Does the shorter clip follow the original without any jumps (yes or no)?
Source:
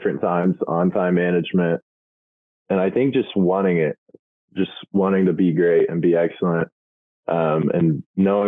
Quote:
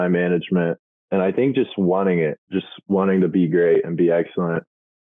no